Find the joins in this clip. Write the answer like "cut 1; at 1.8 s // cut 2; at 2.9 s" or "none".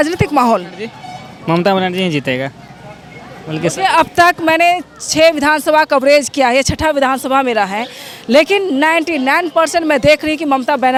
none